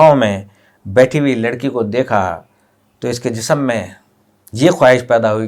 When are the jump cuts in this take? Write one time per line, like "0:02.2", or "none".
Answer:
none